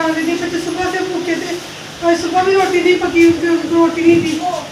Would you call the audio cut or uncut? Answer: uncut